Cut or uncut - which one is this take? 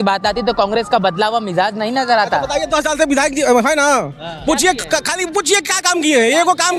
uncut